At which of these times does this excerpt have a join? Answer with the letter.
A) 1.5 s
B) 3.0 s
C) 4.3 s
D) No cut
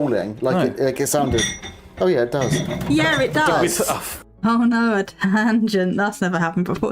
C